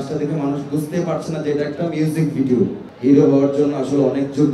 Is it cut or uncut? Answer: cut